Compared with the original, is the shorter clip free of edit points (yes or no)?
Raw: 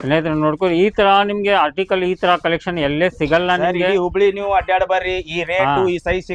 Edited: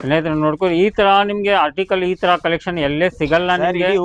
yes